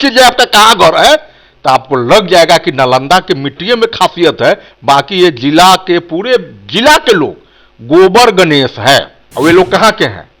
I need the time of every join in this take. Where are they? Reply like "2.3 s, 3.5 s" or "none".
9.2 s